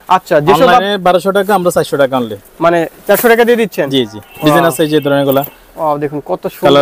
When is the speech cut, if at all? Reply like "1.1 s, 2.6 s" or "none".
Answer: none